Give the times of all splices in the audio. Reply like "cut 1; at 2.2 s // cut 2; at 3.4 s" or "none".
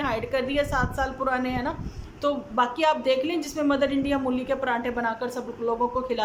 none